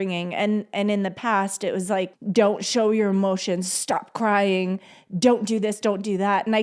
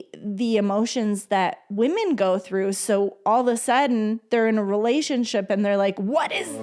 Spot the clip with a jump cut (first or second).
first